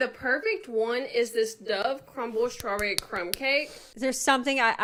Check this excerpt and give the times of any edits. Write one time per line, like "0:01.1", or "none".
none

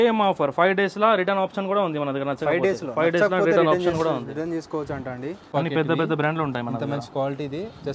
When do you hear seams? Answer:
0:05.4

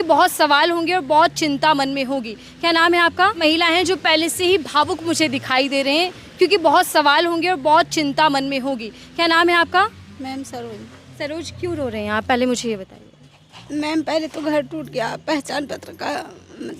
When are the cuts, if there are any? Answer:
0:03.4

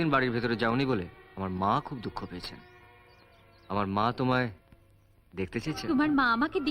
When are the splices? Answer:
0:05.8

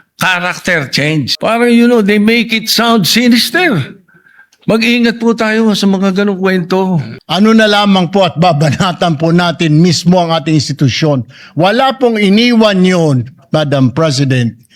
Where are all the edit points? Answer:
0:01.3
0:07.2

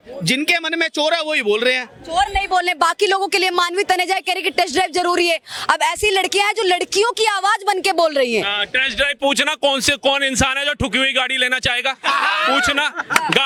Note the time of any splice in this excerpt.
none

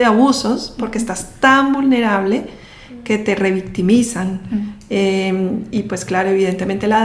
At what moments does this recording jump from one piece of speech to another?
none

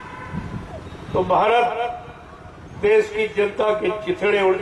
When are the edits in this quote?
none

